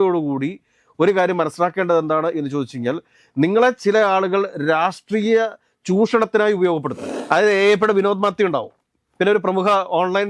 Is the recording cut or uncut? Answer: cut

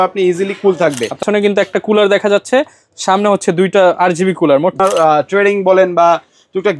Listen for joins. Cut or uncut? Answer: cut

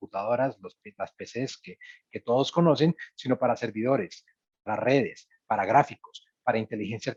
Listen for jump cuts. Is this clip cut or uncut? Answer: uncut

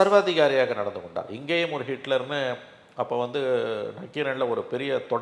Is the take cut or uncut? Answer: uncut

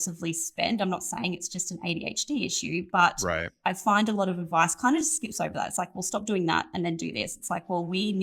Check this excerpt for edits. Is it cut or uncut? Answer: uncut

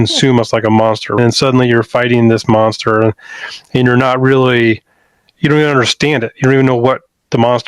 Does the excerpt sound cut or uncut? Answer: cut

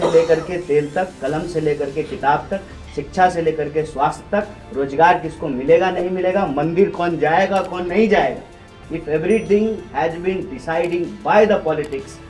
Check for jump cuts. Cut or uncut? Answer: uncut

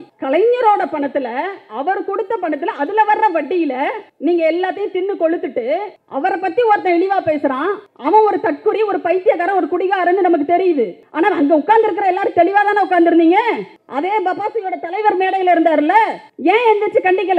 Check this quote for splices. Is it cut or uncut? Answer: uncut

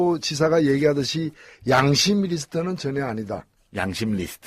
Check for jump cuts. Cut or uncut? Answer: cut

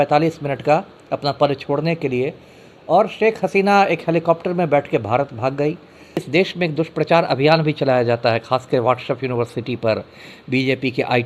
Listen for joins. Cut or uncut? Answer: cut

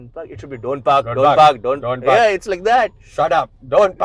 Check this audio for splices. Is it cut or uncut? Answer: uncut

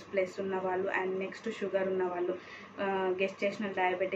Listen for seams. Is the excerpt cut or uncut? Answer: uncut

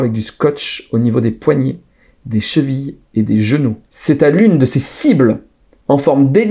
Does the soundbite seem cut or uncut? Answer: cut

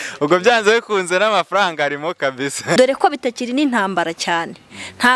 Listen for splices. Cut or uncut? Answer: cut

